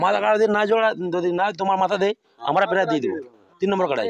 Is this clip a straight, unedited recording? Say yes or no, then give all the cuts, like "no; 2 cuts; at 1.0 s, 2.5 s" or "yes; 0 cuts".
yes; 0 cuts